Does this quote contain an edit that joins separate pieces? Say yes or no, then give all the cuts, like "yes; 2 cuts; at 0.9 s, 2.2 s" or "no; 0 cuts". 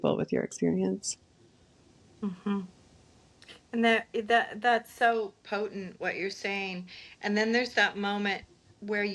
no; 0 cuts